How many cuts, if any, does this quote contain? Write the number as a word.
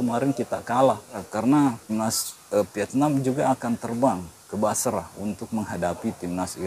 two